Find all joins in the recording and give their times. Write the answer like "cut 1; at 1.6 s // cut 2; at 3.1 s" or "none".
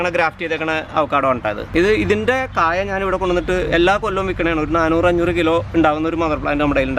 cut 1; at 1.6 s